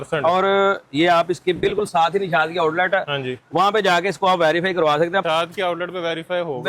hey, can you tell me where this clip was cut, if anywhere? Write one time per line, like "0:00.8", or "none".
0:05.2